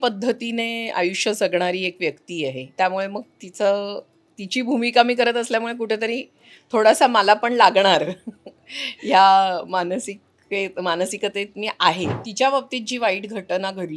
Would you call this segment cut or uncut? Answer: cut